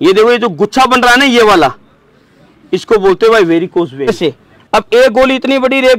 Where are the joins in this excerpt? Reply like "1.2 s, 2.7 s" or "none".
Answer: 4.1 s